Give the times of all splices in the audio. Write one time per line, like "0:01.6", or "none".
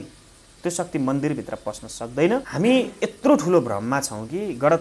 0:02.5